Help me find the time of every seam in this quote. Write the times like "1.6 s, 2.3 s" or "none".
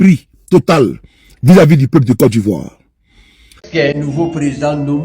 3.6 s